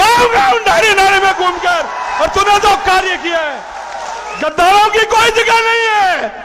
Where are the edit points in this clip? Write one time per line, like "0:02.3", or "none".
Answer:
0:04.3